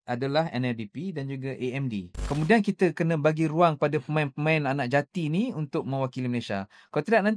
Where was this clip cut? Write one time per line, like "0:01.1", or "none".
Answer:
0:02.1